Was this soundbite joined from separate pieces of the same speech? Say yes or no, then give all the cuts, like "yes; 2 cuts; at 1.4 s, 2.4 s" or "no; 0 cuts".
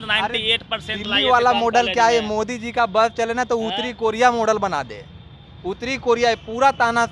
no; 0 cuts